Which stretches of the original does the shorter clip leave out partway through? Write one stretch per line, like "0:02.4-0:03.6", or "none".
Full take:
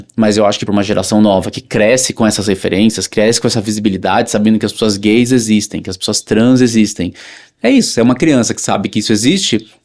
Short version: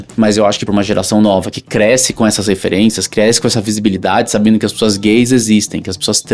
none